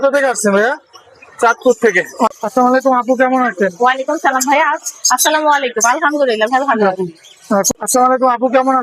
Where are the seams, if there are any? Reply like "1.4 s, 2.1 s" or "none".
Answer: 2.3 s, 7.7 s